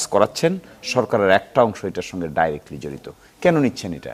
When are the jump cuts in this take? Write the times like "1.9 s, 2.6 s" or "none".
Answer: none

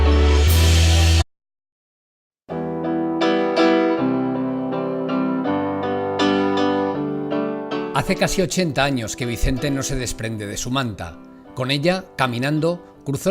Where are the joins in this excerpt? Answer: none

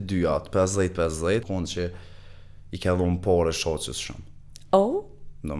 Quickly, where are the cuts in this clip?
1.4 s

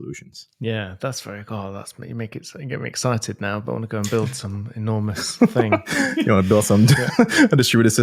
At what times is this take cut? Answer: none

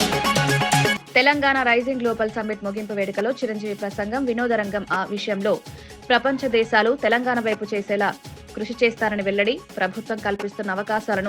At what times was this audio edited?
1.0 s

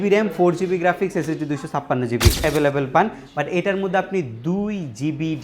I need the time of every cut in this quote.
2.4 s

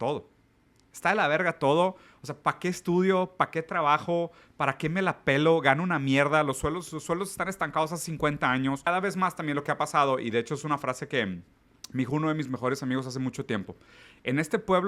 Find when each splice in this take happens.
8.9 s

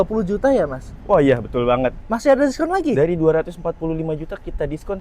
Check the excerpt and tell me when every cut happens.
2.0 s

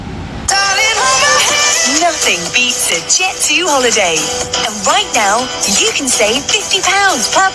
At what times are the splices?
1.0 s

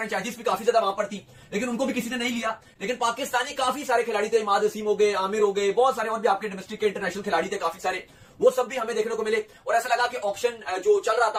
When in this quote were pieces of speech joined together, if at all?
none

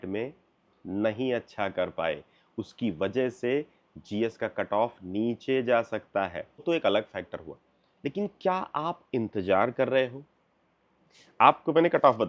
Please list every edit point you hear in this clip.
6.6 s

